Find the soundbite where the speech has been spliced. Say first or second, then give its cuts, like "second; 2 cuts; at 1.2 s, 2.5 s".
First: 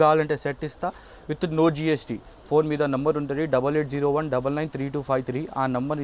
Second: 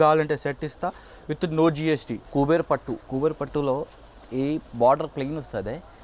second; 2 cuts; at 2.3 s, 3.0 s